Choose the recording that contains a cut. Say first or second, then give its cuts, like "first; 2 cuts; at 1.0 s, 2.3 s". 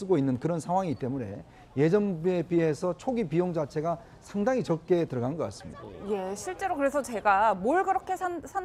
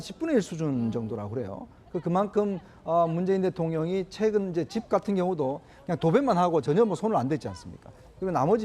second; 1 cut; at 4.1 s